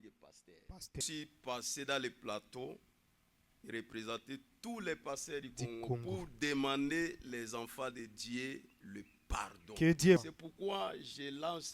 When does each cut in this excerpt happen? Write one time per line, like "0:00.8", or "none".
0:01.0
0:10.3